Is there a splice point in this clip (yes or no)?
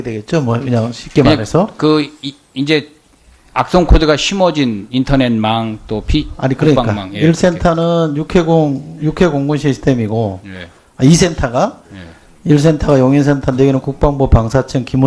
yes